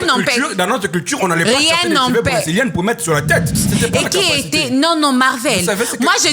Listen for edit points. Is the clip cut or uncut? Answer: cut